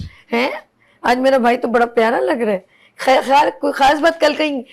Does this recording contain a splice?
no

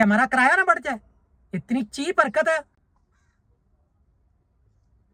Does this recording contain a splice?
no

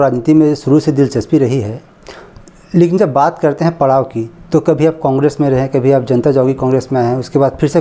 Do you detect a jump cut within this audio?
no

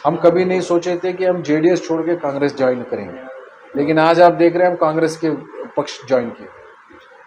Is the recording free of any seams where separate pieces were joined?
yes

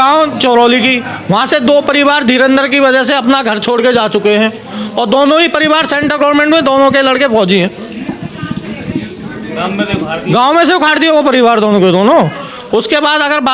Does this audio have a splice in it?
no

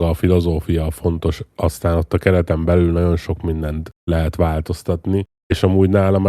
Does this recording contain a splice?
yes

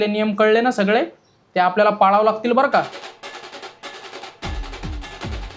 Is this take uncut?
no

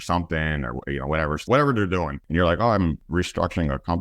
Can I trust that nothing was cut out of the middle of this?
no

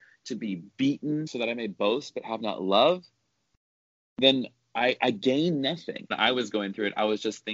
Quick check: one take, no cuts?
no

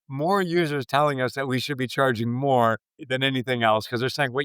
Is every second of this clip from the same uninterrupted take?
no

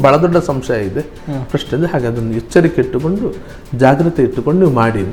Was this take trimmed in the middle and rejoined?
no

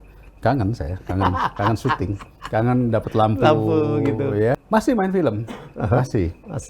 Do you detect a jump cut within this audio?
yes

